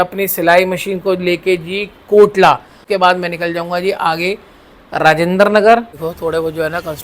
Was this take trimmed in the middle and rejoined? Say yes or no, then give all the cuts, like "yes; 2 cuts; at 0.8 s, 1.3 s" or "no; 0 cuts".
yes; 2 cuts; at 2.8 s, 5.9 s